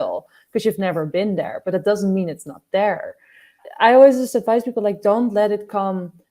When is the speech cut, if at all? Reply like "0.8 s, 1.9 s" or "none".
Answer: 3.6 s